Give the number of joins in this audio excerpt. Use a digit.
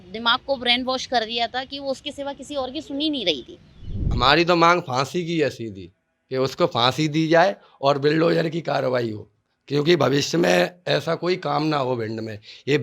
1